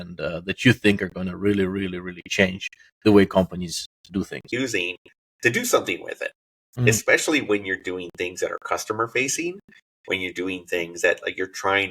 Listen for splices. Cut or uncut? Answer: cut